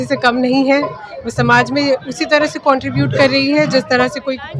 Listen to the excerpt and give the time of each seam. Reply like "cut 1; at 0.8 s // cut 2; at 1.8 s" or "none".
none